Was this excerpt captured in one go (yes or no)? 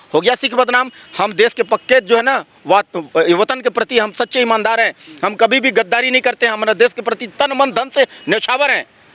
yes